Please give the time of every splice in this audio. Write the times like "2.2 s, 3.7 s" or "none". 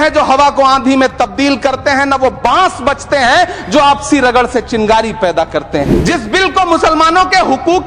5.9 s